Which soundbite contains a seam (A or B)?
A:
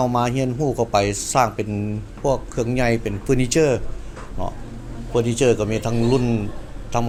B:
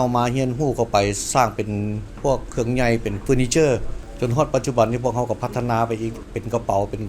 B